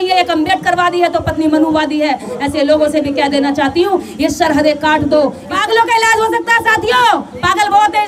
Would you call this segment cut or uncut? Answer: cut